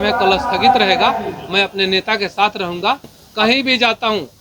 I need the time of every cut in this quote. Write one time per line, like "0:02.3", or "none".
0:03.2